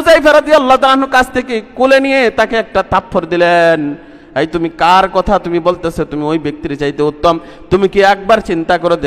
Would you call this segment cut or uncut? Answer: uncut